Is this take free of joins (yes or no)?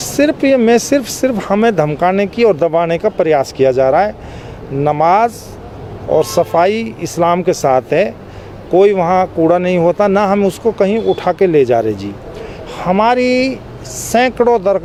yes